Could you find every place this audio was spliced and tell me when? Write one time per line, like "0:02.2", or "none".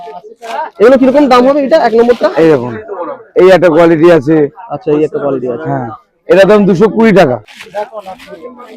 0:07.5

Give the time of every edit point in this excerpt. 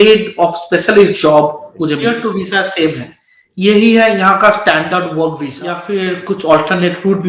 0:02.0
0:05.8

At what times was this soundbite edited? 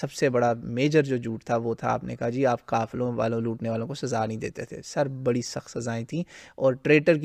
none

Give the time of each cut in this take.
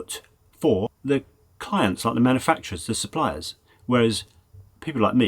0:01.0

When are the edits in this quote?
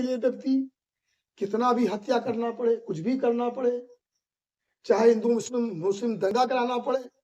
0:06.3

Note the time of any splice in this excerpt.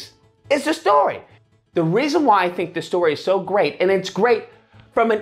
0:01.3

